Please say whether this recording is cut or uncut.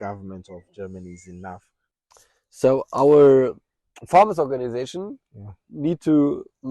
cut